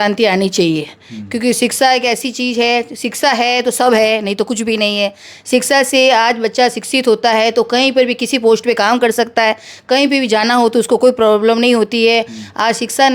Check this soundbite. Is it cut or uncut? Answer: uncut